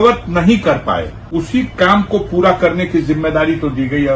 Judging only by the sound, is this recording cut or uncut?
cut